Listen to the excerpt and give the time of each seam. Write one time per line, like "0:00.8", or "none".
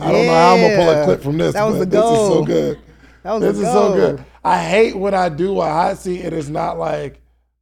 none